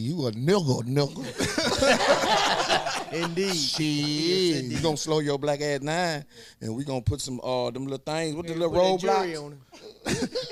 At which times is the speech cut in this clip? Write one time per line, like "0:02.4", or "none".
none